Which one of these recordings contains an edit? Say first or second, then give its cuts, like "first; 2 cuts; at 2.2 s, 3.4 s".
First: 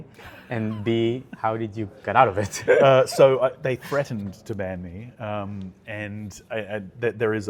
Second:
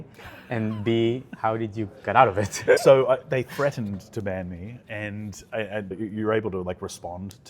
second; 3 cuts; at 2.8 s, 4.8 s, 6.0 s